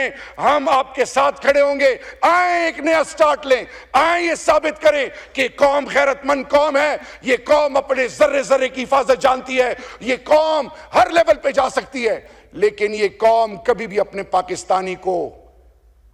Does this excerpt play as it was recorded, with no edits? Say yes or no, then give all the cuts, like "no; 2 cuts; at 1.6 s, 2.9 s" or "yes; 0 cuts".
yes; 0 cuts